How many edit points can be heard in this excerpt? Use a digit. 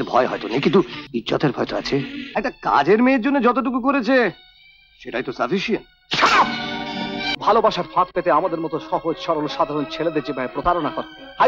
3